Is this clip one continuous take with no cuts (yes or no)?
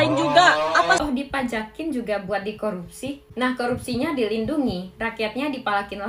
no